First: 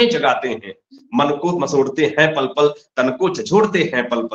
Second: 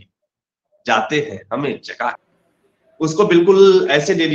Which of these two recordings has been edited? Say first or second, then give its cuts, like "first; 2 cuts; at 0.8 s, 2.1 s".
second; 1 cut; at 2.3 s